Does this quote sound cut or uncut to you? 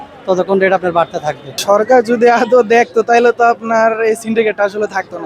cut